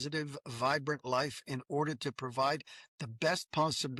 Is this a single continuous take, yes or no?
yes